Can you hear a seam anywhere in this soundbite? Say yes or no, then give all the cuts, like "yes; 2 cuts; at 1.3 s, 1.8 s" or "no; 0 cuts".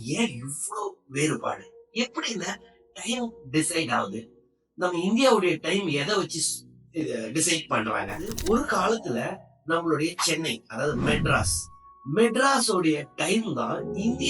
yes; 1 cut; at 8.3 s